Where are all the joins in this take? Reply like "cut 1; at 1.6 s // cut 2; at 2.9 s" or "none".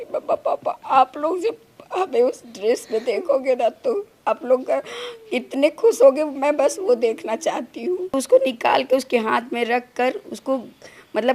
cut 1; at 8.1 s